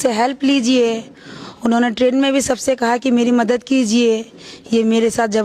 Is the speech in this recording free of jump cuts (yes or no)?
yes